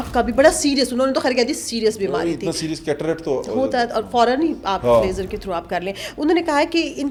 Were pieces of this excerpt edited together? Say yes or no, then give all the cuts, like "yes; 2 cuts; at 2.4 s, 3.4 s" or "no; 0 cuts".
no; 0 cuts